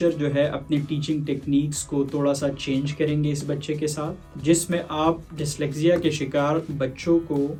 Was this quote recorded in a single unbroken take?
yes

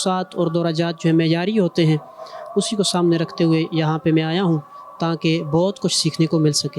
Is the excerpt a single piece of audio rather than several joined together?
yes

